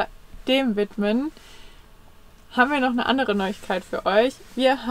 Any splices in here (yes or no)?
no